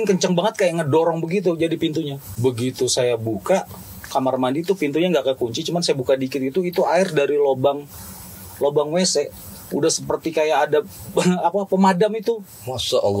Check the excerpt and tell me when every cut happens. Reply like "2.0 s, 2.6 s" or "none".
2.2 s